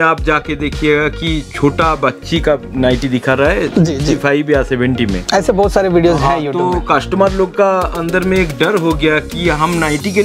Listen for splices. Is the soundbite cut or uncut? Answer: uncut